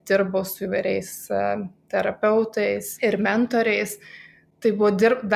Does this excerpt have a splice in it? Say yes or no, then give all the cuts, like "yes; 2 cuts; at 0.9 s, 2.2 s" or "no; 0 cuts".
no; 0 cuts